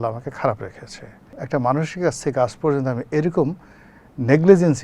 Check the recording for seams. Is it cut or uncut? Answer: cut